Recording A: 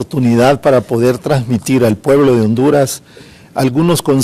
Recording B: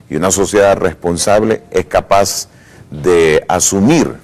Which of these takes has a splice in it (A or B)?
A